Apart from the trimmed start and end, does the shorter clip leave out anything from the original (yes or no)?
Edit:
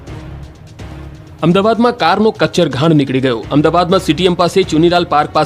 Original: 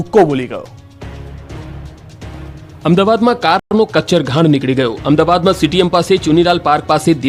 yes